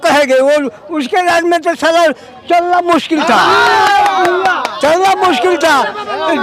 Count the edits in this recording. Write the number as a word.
zero